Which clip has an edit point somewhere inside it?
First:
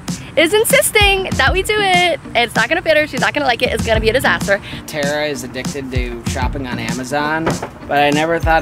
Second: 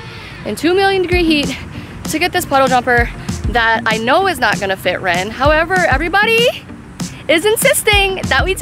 first; 1 cut; at 4.8 s

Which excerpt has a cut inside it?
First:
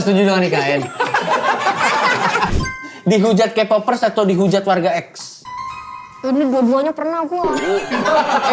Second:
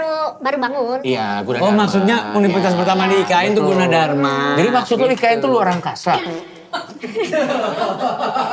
first; 1 cut; at 2.5 s

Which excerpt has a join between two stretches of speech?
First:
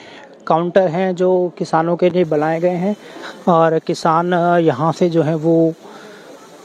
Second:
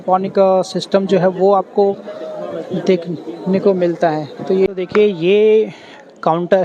second; 1 cut; at 4.7 s

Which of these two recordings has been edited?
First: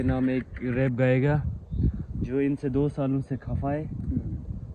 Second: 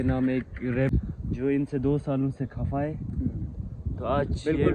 second; 1 cut; at 0.9 s

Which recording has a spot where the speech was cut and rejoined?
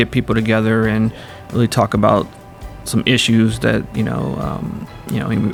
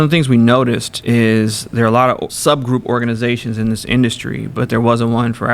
second; 2 cuts; at 0.9 s, 2.3 s

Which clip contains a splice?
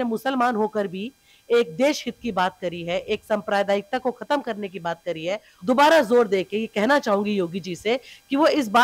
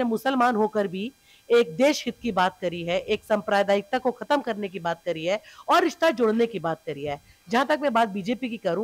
first; 1 cut; at 5.5 s

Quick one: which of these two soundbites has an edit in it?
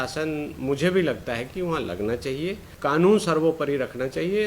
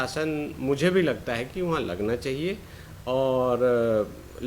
first; 1 cut; at 2.7 s

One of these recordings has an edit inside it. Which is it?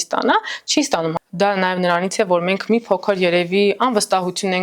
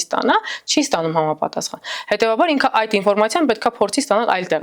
first; 1 cut; at 1.1 s

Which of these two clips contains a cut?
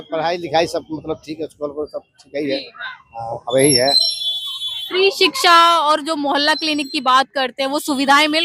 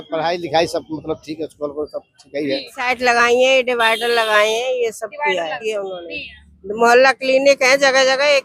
second; 2 cuts; at 2.8 s, 5.6 s

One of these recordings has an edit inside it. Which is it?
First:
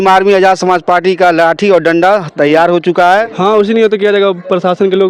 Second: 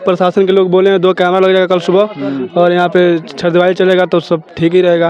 first; 1 cut; at 3.3 s

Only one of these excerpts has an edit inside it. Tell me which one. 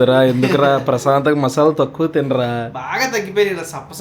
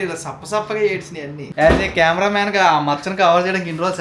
second; 1 cut; at 1.4 s

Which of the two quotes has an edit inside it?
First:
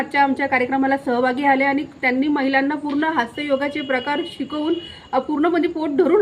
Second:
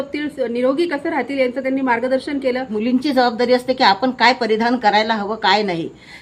second; 1 cut; at 2.7 s

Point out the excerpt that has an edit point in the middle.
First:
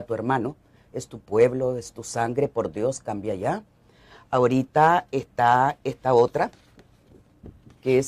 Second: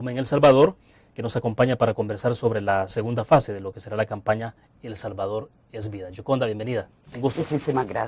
second; 1 cut; at 6.5 s

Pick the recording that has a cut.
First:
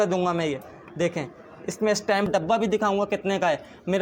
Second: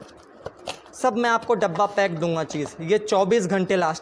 first; 1 cut; at 2.3 s

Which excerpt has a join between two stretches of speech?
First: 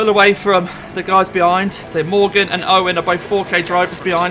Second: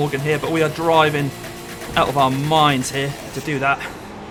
first; 1 cut; at 1.8 s

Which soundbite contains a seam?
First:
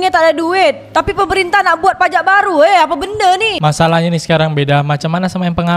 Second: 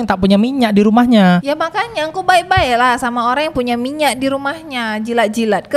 first; 1 cut; at 3.6 s

